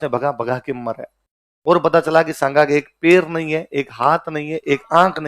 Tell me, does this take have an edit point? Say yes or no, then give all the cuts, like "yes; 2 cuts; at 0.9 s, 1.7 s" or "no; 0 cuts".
no; 0 cuts